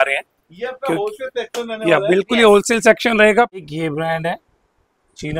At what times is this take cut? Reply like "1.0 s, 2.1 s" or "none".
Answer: 3.7 s